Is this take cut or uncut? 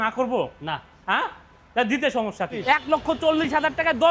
cut